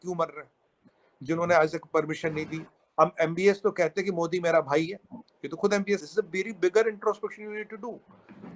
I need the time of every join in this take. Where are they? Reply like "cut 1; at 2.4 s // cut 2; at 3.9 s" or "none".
cut 1; at 6.0 s